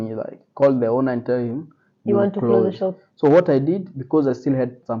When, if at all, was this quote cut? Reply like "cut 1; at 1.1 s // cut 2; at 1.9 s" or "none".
none